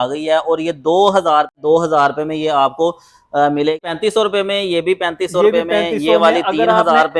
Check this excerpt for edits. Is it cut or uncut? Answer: cut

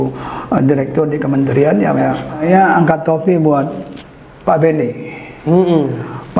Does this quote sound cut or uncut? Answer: cut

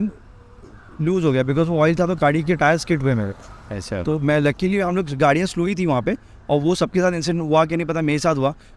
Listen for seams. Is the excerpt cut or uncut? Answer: uncut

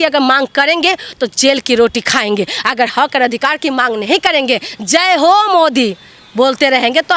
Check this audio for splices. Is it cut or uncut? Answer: uncut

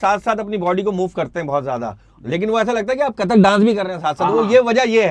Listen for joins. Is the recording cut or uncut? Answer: uncut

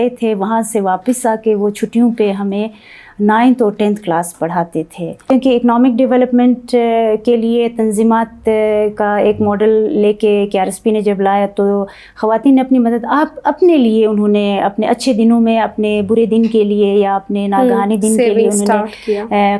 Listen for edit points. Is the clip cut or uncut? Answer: cut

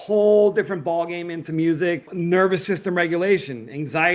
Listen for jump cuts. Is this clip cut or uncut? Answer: cut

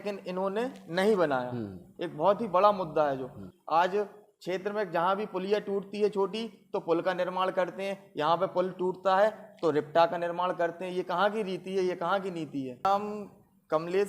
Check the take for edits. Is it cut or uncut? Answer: cut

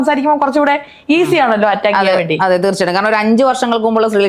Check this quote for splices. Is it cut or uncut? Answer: uncut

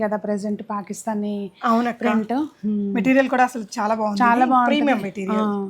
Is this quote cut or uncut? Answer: uncut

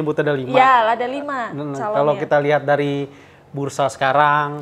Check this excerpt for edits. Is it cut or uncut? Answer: uncut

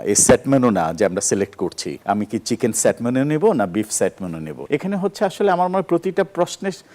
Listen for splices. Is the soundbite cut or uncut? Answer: cut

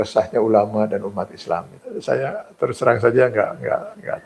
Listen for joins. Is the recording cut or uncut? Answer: cut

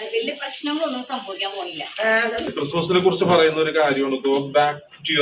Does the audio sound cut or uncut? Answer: cut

